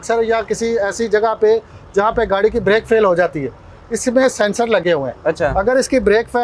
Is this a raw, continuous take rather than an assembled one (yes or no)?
yes